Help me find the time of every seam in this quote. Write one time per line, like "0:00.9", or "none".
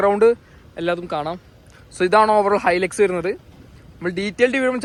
none